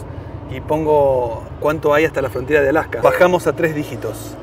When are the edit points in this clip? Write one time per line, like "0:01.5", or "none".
0:03.0